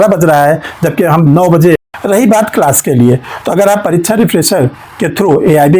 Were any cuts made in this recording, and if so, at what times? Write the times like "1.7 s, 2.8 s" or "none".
1.8 s